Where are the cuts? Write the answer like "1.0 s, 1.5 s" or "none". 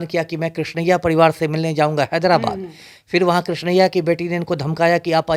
none